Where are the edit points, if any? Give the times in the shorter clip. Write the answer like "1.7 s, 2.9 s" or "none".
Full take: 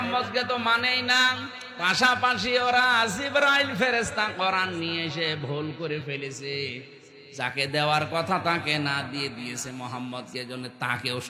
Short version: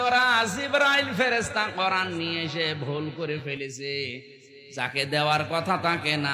none